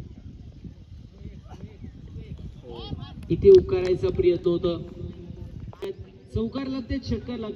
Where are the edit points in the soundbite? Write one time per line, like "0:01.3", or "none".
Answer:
none